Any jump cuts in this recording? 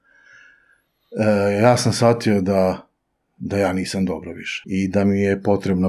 yes; 1 cut; at 4.6 s

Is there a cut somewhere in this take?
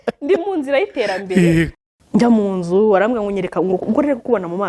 yes; 1 cut; at 1.8 s

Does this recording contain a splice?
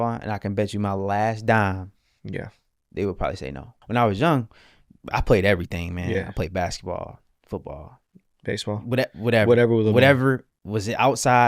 yes; 1 cut; at 3.7 s

